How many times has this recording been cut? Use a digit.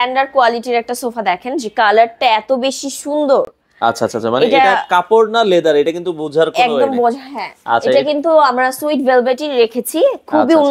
0